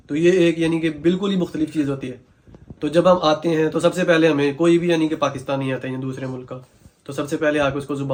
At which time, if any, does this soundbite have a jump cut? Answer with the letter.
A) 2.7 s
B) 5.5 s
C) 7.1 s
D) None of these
D